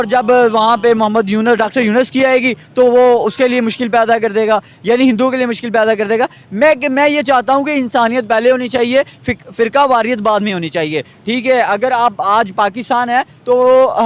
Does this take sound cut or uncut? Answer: uncut